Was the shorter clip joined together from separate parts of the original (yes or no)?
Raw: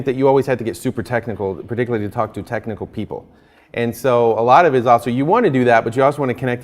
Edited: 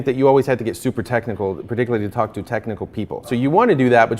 yes